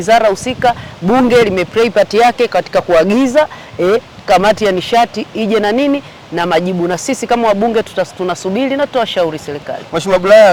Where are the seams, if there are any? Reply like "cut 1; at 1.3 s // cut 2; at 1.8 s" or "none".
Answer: none